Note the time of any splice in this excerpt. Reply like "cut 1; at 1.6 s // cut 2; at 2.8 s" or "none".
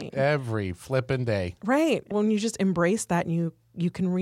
cut 1; at 2.1 s